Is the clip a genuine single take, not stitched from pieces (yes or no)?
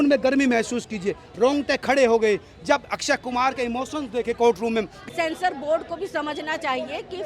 no